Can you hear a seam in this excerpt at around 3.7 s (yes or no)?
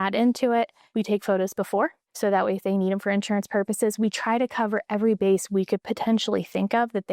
no